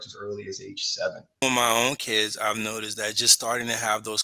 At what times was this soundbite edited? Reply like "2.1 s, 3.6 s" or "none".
1.4 s